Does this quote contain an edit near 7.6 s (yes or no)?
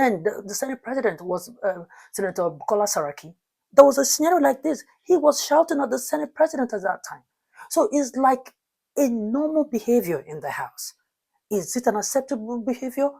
yes